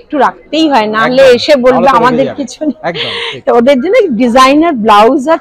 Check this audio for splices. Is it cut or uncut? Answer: uncut